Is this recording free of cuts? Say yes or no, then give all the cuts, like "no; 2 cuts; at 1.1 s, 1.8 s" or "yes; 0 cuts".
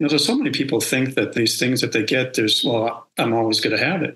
no; 2 cuts; at 1.4 s, 3.0 s